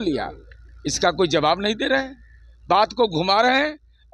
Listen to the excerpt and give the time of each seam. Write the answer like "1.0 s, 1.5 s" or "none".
none